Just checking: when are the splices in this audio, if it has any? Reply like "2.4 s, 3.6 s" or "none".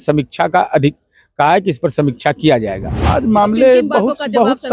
2.9 s